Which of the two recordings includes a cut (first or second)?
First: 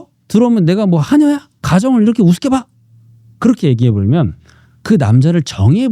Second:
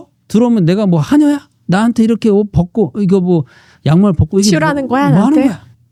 first